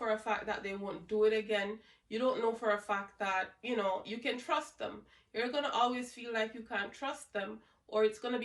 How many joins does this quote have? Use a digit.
0